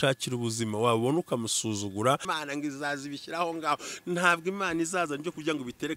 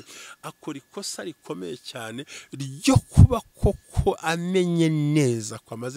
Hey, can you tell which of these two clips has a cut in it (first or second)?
first